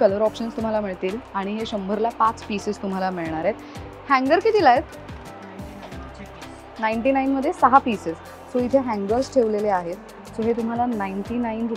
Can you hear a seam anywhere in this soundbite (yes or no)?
no